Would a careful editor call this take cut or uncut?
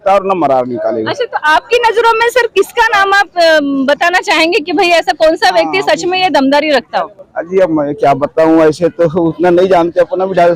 uncut